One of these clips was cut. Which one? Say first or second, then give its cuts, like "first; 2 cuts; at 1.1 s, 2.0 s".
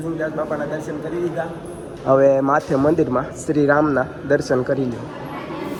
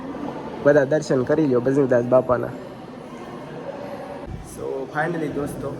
second; 1 cut; at 4.3 s